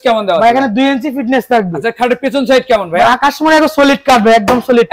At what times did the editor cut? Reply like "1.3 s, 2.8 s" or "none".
none